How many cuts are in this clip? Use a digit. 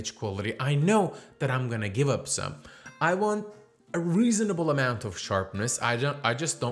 0